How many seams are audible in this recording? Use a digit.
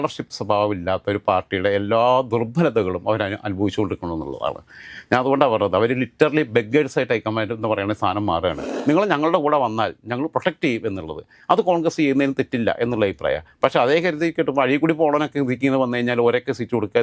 1